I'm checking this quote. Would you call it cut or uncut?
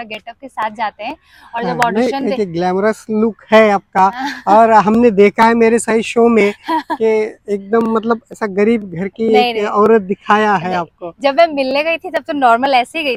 uncut